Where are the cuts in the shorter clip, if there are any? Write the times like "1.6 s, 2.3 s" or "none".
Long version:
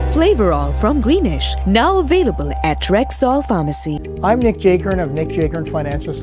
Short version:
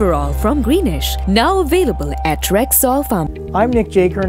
3.4 s